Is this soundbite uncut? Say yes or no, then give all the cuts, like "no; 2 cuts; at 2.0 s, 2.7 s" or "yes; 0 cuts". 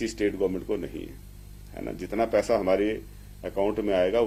yes; 0 cuts